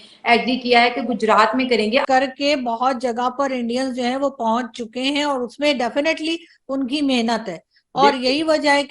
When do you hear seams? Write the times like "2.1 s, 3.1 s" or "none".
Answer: 2.0 s